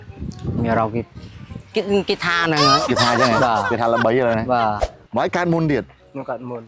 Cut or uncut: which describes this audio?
cut